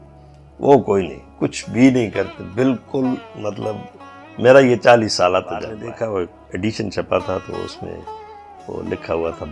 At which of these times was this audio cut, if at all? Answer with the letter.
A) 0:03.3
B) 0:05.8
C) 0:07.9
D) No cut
B